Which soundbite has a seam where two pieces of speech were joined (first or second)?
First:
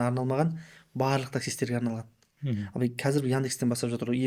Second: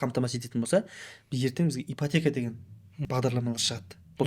second